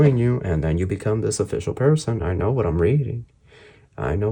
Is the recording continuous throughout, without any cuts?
yes; 0 cuts

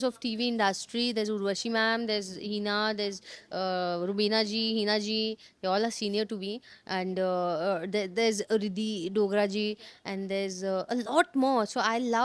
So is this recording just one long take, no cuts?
yes; 0 cuts

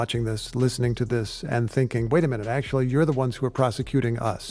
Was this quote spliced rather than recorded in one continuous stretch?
no; 0 cuts

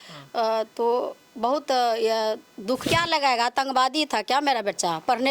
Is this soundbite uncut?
no; 1 cut; at 2.8 s

